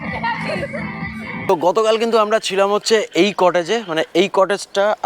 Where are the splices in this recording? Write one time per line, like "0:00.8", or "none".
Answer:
0:01.3